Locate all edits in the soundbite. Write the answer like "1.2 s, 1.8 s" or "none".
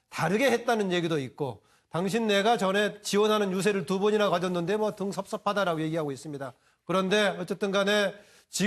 2.1 s